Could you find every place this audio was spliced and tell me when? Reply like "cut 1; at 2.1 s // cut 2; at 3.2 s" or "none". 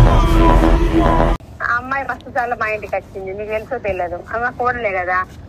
cut 1; at 1.5 s